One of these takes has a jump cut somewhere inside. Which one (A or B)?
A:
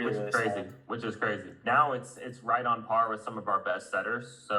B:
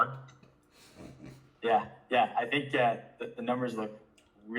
A